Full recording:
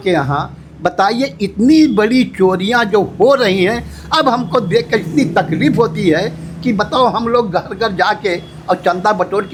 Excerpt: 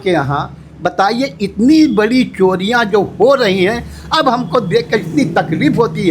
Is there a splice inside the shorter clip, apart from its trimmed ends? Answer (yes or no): no